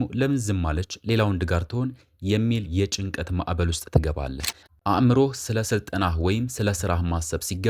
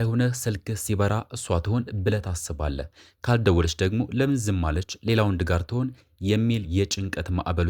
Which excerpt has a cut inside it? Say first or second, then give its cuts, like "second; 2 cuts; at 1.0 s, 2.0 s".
first; 1 cut; at 4.6 s